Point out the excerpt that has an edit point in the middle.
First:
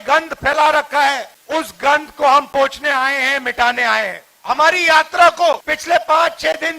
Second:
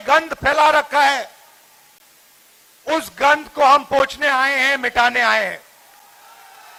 first; 3 cuts; at 1.3 s, 4.3 s, 5.7 s

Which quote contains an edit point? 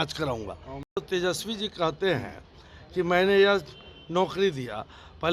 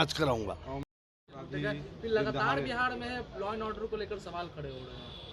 first; 1 cut; at 0.9 s

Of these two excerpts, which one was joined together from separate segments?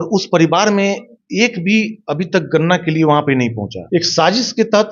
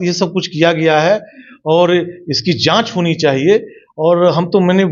first; 1 cut; at 3.7 s

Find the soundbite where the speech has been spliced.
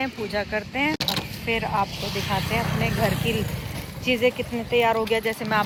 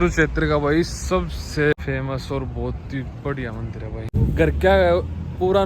second; 2 cuts; at 1.7 s, 4.1 s

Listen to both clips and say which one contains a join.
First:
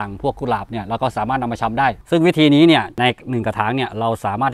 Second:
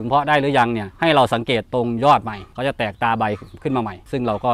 first; 2 cuts; at 2.0 s, 2.9 s

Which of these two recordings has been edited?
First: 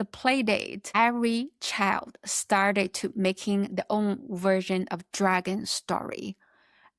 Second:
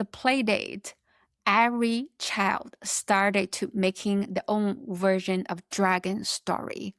first; 1 cut; at 0.9 s

